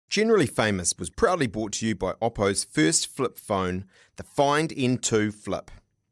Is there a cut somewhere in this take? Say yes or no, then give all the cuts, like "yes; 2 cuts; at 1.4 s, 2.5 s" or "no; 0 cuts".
no; 0 cuts